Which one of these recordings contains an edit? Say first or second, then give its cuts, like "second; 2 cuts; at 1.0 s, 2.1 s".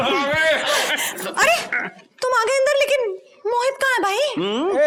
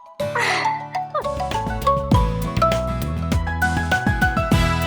second; 1 cut; at 1.5 s